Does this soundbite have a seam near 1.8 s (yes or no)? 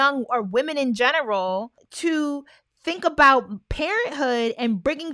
yes